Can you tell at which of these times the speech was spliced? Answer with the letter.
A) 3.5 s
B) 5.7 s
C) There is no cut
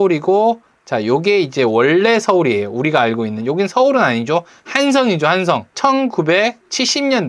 B